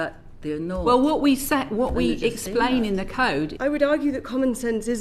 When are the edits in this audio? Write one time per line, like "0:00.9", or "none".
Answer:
0:03.5